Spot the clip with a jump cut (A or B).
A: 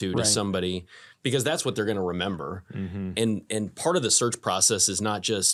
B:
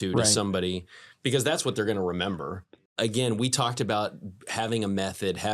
B